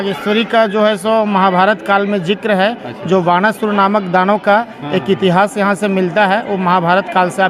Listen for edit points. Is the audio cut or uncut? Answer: uncut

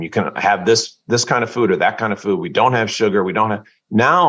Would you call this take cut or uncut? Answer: uncut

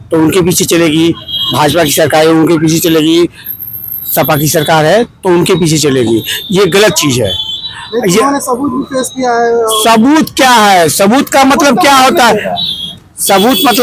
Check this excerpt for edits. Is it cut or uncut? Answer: uncut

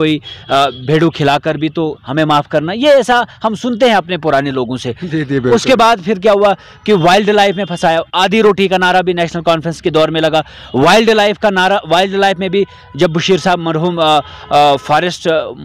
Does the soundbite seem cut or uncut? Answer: uncut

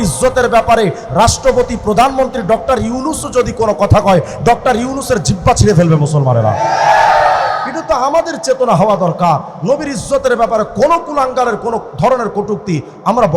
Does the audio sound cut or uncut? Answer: uncut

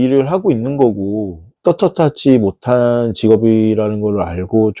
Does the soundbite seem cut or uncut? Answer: uncut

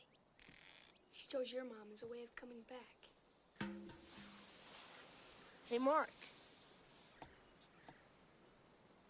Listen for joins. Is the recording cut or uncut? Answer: cut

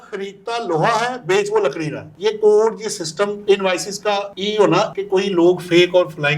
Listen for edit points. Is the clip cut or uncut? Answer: cut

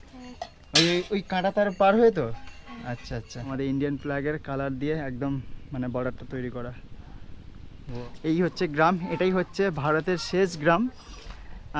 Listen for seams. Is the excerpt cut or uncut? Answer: cut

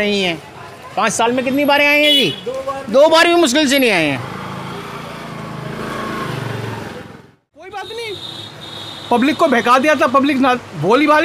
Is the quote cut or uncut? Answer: cut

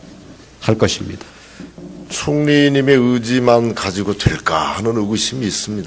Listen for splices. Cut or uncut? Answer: uncut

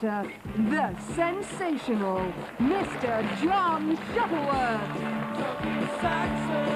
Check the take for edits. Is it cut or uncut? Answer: uncut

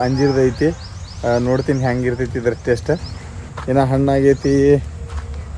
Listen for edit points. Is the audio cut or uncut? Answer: uncut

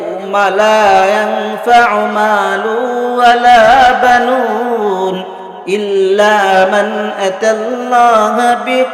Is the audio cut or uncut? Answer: uncut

